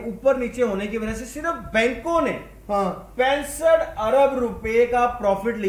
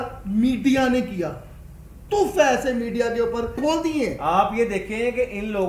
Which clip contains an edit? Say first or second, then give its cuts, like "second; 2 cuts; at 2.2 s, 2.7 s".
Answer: second; 1 cut; at 3.5 s